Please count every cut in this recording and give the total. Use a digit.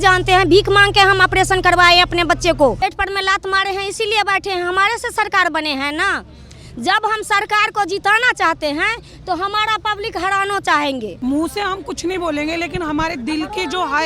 2